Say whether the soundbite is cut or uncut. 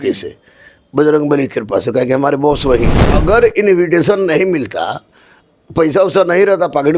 cut